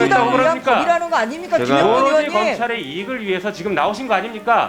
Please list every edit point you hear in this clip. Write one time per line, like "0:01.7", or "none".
none